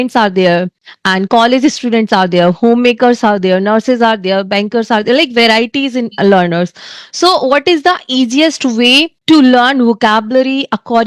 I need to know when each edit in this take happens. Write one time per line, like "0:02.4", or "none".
none